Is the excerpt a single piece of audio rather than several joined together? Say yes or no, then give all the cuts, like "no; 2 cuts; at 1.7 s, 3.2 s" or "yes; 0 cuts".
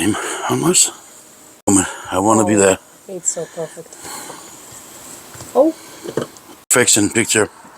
no; 2 cuts; at 1.7 s, 6.7 s